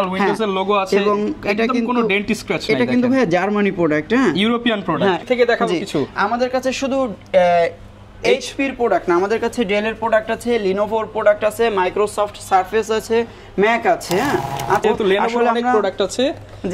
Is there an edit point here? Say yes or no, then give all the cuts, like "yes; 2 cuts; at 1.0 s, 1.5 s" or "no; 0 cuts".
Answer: yes; 2 cuts; at 5.2 s, 14.8 s